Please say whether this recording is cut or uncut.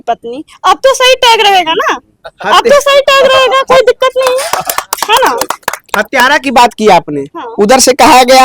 uncut